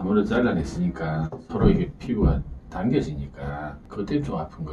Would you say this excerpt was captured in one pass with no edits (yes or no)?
no